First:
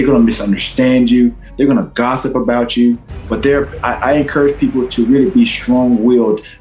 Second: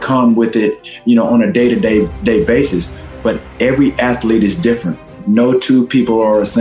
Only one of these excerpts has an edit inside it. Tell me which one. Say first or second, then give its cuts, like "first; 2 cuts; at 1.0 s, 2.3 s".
second; 1 cut; at 5.2 s